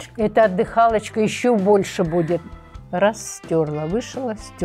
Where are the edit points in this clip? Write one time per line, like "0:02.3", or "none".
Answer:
0:02.4